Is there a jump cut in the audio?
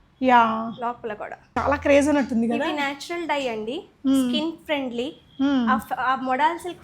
yes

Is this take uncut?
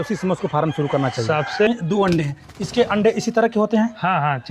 no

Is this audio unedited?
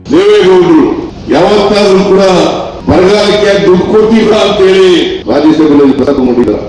no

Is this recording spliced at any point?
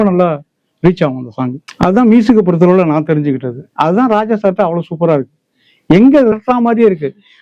yes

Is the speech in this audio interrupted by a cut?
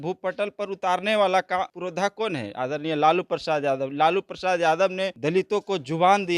yes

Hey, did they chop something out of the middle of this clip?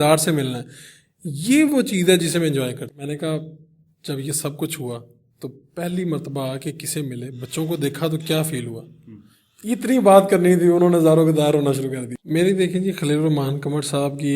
yes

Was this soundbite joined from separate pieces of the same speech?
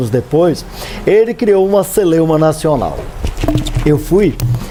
no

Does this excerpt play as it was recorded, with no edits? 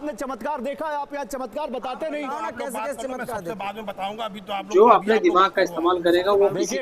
no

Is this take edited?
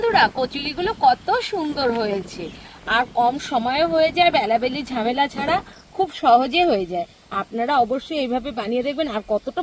no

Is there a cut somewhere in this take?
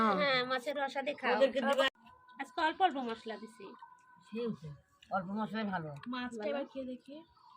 yes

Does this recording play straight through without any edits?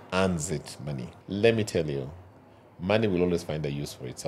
no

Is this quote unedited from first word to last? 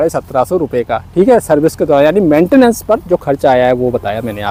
yes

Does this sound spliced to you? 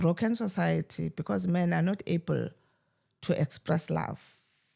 no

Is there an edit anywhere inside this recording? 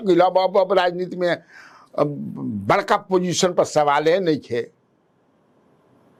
no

